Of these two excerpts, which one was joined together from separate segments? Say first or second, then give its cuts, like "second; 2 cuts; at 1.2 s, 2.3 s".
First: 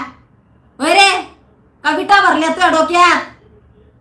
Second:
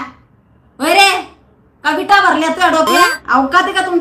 second; 1 cut; at 3.1 s